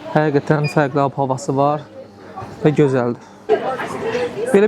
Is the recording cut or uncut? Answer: cut